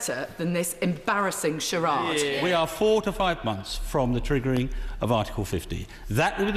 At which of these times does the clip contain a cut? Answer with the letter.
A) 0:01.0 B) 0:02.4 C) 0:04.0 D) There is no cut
B